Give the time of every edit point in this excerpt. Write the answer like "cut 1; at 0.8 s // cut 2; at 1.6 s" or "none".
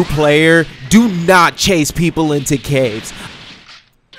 cut 1; at 3.2 s

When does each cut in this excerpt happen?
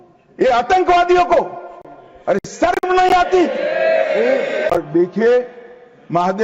cut 1; at 4.7 s

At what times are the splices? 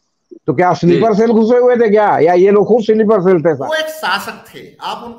cut 1; at 3.6 s

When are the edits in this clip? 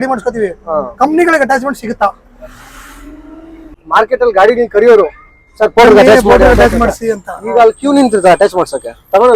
cut 1; at 3.8 s

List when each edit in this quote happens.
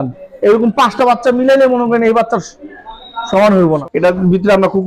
cut 1; at 3.8 s

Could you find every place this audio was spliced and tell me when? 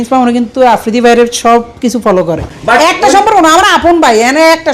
cut 1; at 2.5 s

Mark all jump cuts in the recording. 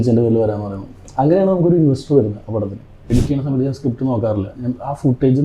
cut 1; at 3.1 s

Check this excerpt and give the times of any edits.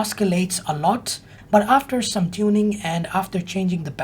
cut 1; at 1.3 s

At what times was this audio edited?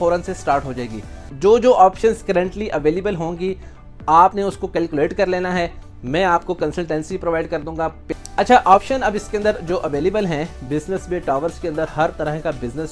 cut 1; at 1.2 s // cut 2; at 8.0 s

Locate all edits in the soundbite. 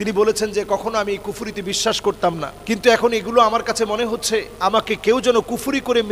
cut 1; at 2.5 s // cut 2; at 4.5 s

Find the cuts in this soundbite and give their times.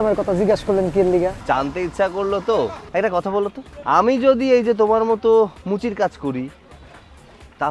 cut 1; at 1.4 s // cut 2; at 2.8 s // cut 3; at 3.7 s

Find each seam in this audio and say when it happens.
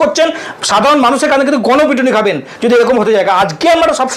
none

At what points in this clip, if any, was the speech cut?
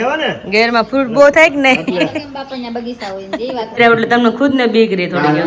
cut 1; at 3.8 s

